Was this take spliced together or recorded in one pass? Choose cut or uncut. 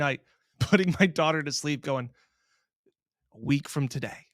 uncut